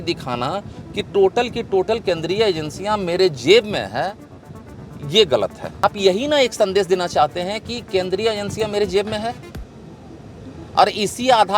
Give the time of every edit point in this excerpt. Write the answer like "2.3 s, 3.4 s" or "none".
5.8 s